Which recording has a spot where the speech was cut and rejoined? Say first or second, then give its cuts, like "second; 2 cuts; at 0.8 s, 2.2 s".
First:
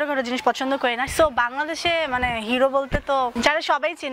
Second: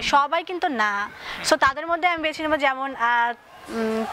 first; 2 cuts; at 1.1 s, 3.3 s